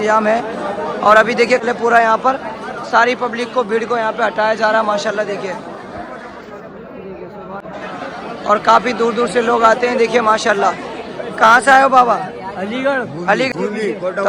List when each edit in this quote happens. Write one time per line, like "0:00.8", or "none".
0:01.6
0:07.6
0:13.5